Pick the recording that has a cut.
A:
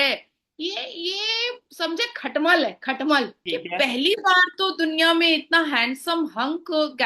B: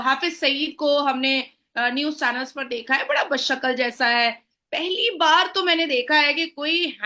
A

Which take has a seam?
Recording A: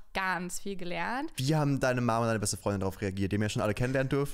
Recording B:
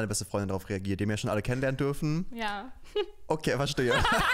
A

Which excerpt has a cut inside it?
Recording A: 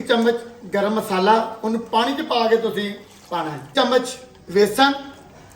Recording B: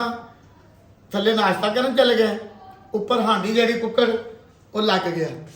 A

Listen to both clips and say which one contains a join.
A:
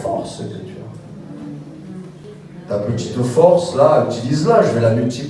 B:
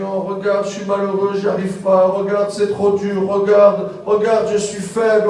A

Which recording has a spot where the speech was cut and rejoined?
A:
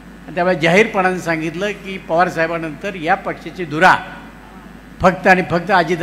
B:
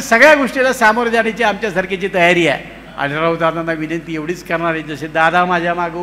B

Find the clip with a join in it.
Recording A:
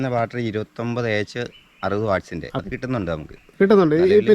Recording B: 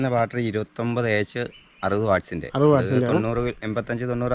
A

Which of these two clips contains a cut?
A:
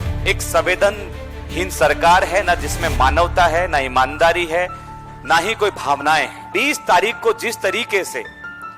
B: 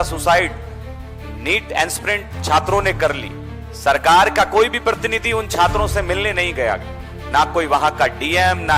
A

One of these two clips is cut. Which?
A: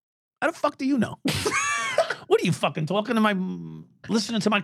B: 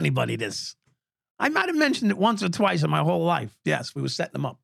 B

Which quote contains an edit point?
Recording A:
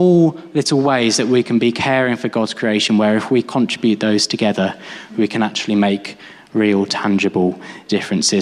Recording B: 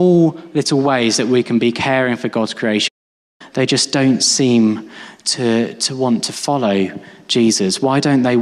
B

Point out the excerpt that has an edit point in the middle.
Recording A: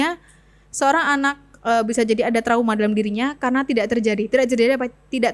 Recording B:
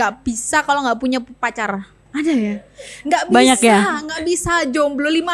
B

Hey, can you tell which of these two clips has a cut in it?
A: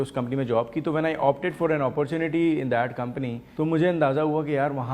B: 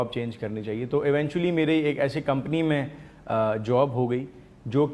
A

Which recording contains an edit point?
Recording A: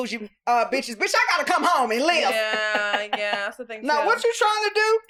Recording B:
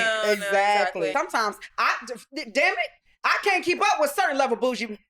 B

